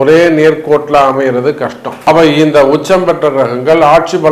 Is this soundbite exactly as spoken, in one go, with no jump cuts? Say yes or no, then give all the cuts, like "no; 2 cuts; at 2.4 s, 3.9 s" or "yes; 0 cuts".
no; 1 cut; at 1.9 s